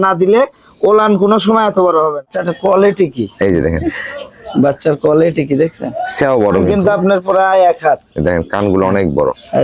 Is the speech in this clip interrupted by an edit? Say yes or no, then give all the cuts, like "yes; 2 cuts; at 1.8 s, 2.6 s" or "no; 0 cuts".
yes; 2 cuts; at 2.3 s, 6.7 s